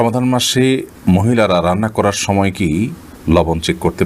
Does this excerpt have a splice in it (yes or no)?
no